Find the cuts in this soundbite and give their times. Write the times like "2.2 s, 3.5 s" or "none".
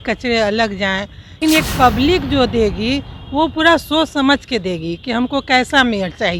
1.4 s